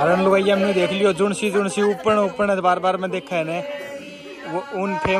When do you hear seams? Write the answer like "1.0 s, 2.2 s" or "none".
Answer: none